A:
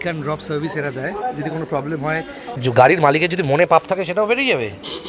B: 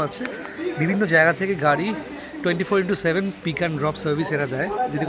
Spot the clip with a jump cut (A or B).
A